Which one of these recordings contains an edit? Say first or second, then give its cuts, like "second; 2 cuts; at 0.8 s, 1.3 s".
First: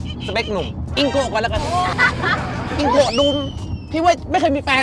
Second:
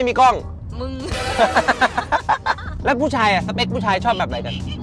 second; 1 cut; at 2.7 s